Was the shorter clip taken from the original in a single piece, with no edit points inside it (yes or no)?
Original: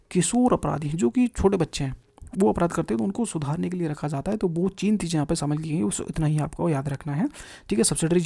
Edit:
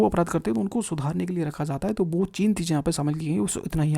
yes